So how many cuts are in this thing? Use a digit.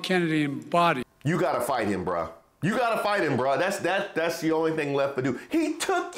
1